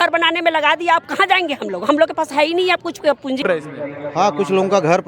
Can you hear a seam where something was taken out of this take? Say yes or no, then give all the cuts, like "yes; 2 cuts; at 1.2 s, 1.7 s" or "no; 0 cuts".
yes; 1 cut; at 3.4 s